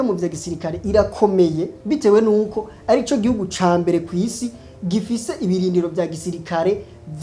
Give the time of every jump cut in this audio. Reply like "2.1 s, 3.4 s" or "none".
1.7 s